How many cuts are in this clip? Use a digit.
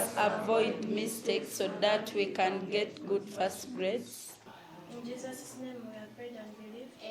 1